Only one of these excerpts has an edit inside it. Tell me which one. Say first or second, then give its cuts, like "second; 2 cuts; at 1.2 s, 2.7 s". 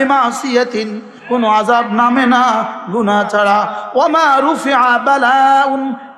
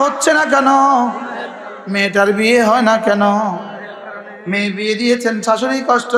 first; 1 cut; at 1.1 s